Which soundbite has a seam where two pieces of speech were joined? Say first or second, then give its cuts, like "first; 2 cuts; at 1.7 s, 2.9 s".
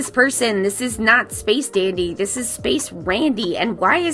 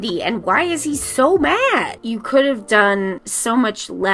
second; 1 cut; at 2.0 s